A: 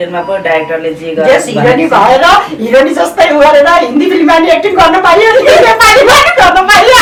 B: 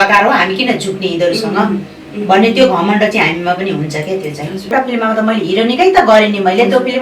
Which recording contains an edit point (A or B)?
B